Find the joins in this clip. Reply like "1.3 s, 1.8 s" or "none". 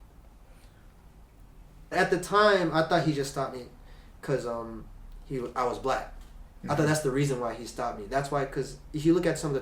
1.9 s